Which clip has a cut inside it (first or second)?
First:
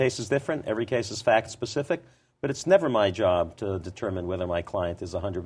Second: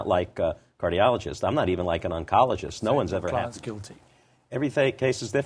second